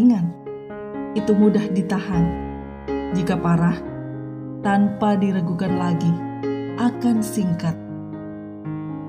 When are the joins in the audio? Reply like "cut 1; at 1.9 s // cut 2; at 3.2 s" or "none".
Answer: cut 1; at 7.7 s